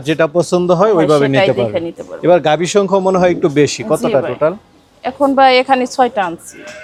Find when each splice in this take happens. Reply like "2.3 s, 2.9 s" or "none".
none